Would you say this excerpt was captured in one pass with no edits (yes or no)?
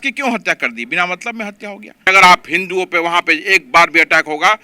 no